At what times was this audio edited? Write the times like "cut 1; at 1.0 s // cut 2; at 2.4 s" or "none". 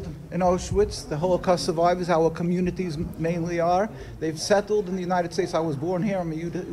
cut 1; at 3.2 s